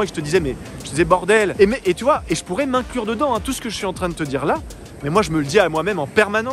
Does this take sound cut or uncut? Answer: uncut